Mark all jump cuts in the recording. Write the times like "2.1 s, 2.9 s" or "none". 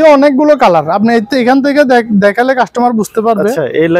none